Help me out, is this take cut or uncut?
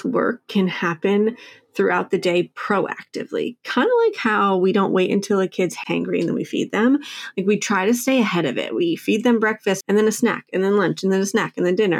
cut